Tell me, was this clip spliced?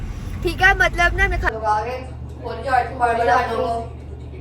yes; 1 cut; at 1.5 s

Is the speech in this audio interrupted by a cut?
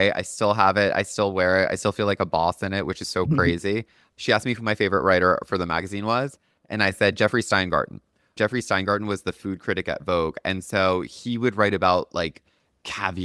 no; 0 cuts

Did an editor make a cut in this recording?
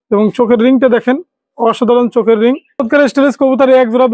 yes; 1 cut; at 2.7 s

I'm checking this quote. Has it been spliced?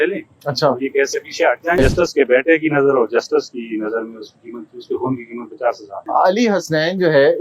yes; 2 cuts; at 1.8 s, 6.0 s

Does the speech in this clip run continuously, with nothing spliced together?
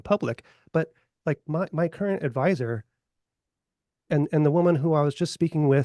yes; 0 cuts

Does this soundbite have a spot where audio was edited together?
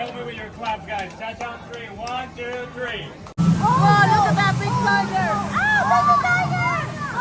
yes; 1 cut; at 3.4 s

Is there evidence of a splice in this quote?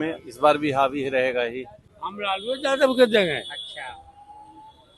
yes; 1 cut; at 2.0 s

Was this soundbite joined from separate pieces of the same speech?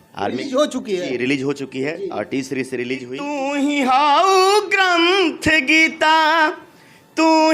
yes; 1 cut; at 3.3 s

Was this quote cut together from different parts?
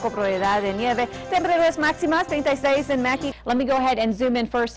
yes; 1 cut; at 3.3 s

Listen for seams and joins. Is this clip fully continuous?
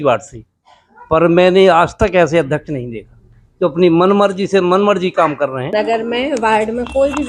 no; 1 cut; at 5.7 s

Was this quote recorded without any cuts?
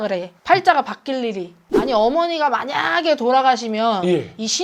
no; 1 cut; at 1.6 s

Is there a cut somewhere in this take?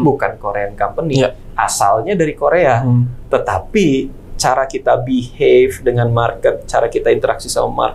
no; 0 cuts

